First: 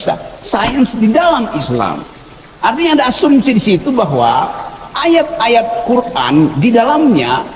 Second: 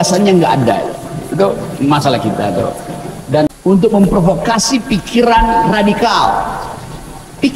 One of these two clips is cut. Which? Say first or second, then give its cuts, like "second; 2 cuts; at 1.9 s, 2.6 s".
second; 1 cut; at 3.5 s